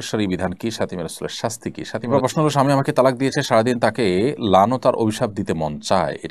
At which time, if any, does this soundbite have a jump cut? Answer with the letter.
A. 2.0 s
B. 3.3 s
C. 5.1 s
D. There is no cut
A